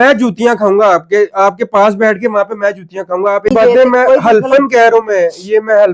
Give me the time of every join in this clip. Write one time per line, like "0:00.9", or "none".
0:03.5